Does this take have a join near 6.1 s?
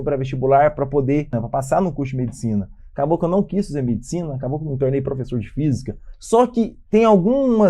yes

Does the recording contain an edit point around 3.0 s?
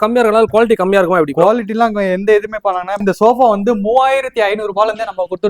yes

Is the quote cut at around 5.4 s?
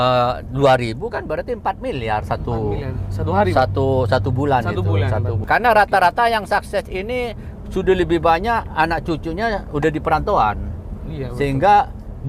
yes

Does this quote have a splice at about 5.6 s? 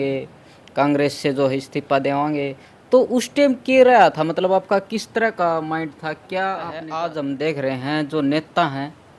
no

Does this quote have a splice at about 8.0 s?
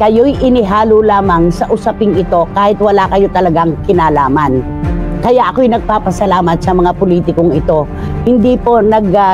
yes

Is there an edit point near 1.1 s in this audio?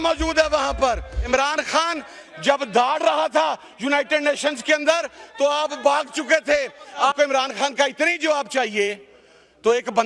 yes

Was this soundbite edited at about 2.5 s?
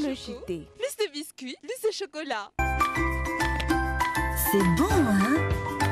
yes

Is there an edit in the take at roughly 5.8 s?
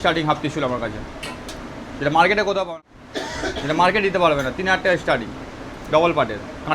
no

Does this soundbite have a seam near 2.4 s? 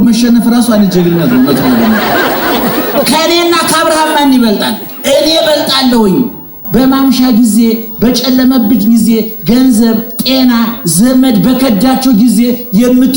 no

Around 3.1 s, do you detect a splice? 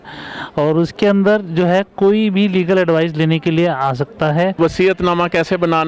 no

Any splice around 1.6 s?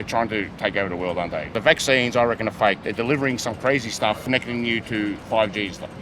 yes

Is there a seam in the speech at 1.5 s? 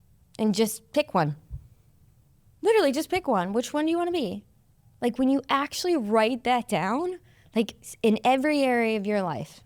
no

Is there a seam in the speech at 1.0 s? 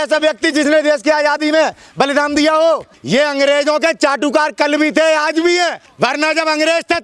no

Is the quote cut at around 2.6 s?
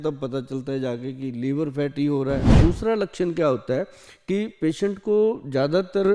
yes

